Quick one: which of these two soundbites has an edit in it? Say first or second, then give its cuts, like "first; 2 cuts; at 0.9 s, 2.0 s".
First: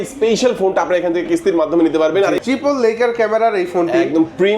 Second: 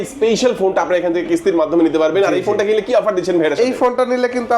first; 1 cut; at 2.4 s